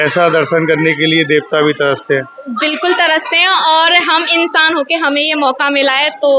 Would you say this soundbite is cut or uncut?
uncut